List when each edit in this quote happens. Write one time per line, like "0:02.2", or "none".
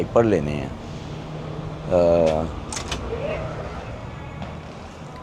none